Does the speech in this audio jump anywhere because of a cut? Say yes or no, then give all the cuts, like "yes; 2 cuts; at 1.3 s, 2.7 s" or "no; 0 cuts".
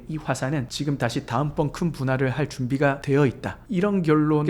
no; 0 cuts